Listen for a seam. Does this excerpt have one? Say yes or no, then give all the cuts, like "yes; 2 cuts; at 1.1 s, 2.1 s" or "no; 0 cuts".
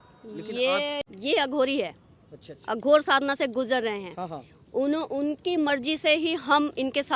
yes; 1 cut; at 1.0 s